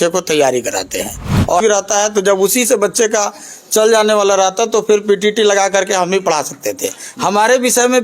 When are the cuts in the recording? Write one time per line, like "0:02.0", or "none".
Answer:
0:01.6